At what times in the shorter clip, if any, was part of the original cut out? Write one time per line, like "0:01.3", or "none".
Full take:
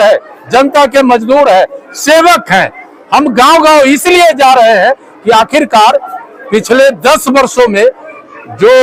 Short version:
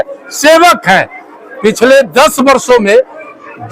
0:01.3